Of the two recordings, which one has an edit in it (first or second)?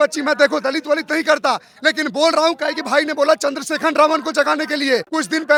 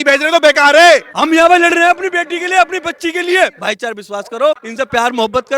second